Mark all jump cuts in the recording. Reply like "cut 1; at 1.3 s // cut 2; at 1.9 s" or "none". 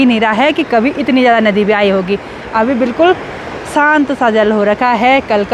none